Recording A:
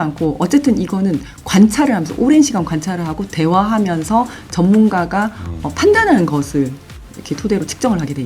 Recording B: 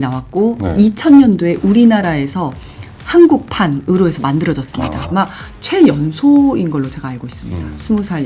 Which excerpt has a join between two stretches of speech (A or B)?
B